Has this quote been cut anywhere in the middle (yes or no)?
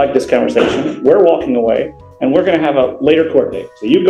no